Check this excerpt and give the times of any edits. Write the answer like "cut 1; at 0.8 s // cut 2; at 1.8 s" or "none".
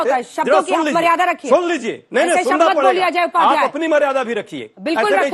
none